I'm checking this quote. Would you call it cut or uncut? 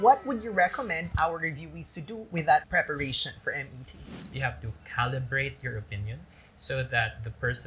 cut